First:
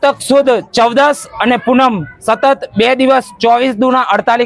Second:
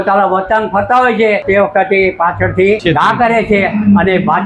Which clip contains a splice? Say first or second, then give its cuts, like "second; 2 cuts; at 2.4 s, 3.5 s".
second; 2 cuts; at 1.4 s, 2.8 s